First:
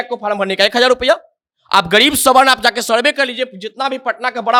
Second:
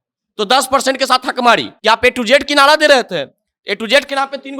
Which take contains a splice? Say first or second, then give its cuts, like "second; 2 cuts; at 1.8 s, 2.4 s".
second; 1 cut; at 1.7 s